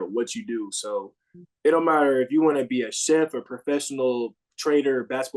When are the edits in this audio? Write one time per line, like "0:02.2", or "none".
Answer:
none